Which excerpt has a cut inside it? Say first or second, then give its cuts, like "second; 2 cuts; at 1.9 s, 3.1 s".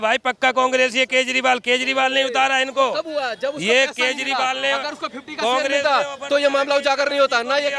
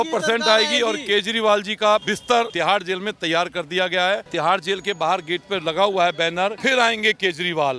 second; 3 cuts; at 2.2 s, 4.3 s, 6.6 s